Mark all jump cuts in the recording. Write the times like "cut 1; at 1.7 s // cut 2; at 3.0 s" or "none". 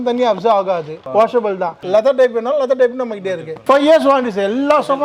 cut 1; at 1.0 s // cut 2; at 1.8 s // cut 3; at 3.5 s